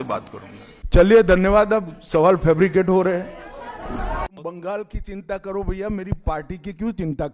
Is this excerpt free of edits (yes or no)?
no